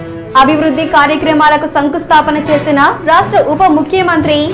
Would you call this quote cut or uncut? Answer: uncut